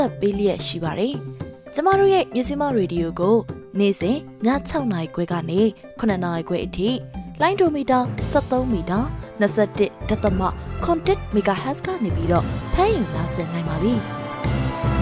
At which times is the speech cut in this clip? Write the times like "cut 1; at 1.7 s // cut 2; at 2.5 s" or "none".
cut 1; at 14.1 s